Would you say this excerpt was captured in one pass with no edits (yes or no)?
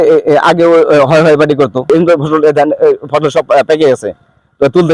no